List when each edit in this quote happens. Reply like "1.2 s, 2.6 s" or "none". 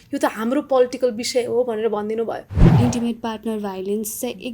2.6 s